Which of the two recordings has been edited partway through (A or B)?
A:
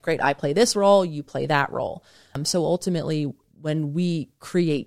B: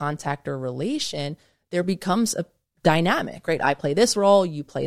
A